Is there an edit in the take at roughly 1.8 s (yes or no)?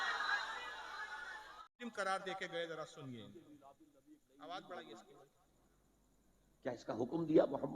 yes